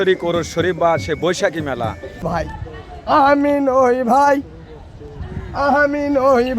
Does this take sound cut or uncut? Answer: cut